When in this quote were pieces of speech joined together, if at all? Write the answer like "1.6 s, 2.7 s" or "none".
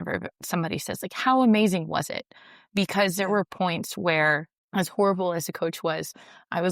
4.5 s